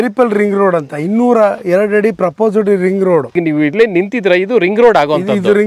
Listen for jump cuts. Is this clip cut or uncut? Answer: cut